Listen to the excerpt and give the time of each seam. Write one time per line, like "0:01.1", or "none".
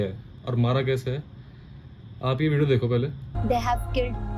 0:03.3